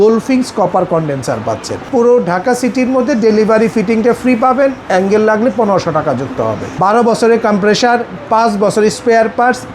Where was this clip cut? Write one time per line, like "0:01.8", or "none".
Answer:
0:01.9
0:06.7